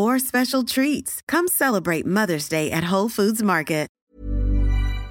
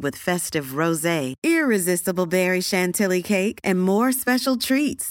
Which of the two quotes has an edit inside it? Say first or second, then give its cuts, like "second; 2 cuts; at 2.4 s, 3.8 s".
first; 1 cut; at 4.0 s